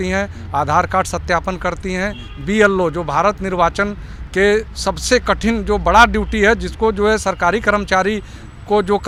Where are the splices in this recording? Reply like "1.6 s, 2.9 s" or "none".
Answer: none